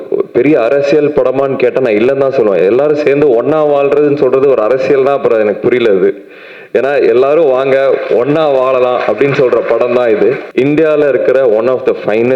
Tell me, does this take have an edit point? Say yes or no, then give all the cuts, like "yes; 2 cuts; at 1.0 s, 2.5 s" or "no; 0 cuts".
yes; 1 cut; at 10.4 s